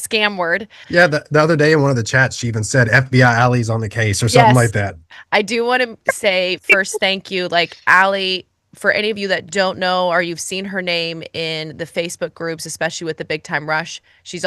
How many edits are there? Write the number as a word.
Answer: two